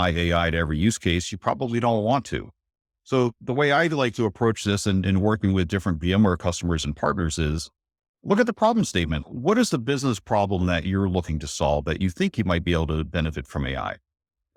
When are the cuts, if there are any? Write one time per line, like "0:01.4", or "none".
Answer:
none